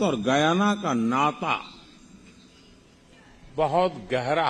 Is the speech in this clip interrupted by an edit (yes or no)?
no